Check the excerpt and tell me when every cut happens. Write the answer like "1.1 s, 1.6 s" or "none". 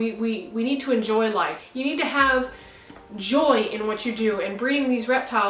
1.6 s